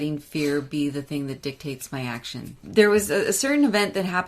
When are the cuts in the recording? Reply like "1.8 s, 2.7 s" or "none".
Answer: 2.5 s